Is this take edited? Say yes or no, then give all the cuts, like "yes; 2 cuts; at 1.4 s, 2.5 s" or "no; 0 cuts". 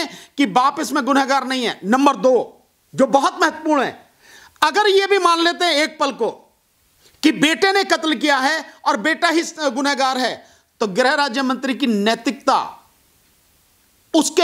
no; 0 cuts